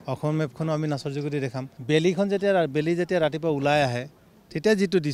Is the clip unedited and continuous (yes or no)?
no